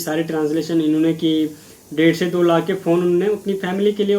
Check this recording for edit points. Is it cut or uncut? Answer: uncut